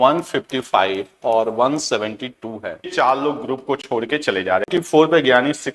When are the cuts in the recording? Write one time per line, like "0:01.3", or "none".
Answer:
0:02.9
0:04.7